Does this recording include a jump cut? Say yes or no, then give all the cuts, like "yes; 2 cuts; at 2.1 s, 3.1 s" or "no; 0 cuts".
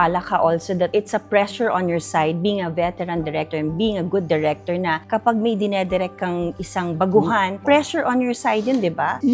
no; 0 cuts